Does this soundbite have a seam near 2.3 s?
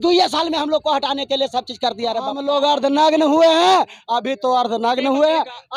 yes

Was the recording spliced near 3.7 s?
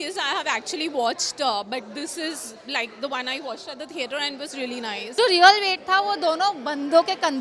no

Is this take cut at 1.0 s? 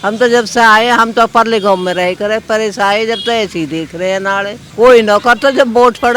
no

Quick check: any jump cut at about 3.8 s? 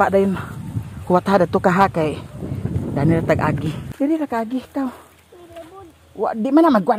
yes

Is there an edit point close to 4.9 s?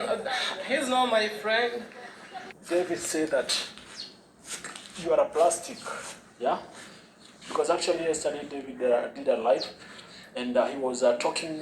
no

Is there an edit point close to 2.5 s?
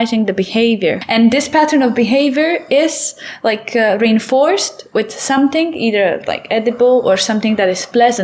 no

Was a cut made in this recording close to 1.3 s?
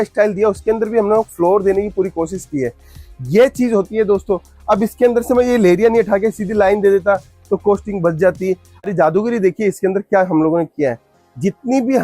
no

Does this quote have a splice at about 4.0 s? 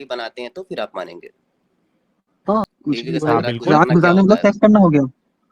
no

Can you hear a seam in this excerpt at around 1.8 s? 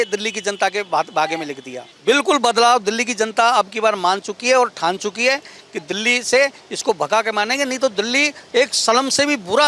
yes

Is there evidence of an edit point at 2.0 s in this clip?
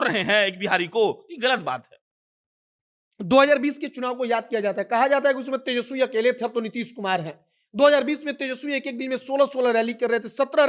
no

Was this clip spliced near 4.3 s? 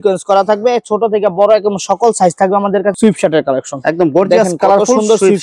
no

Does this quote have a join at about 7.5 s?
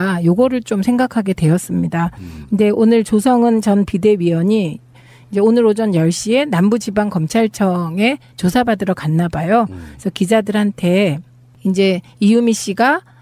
yes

